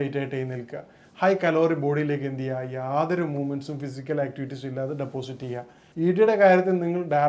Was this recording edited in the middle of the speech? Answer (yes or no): yes